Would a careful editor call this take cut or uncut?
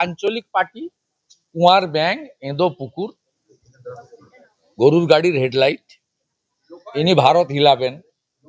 uncut